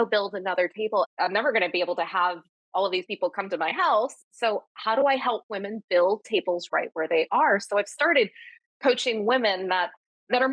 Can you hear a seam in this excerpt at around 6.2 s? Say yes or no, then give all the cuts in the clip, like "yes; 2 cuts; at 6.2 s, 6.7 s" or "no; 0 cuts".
no; 1 cut; at 1.1 s